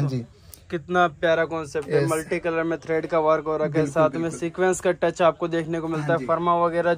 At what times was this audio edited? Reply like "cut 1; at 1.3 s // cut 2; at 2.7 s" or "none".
none